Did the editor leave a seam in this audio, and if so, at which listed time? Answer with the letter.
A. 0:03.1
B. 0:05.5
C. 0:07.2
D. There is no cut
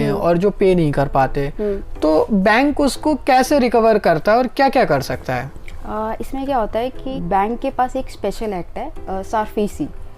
C